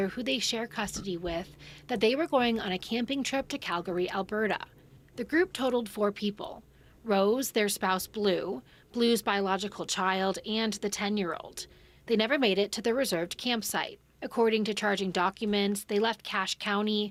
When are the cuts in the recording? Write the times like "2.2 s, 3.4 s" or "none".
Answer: none